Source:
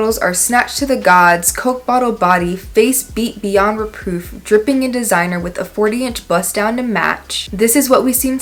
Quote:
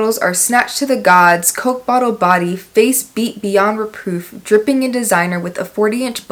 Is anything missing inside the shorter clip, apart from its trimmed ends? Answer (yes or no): no